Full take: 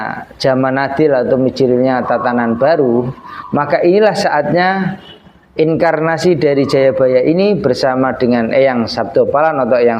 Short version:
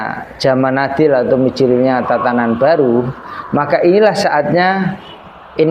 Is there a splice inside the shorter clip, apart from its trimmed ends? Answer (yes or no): no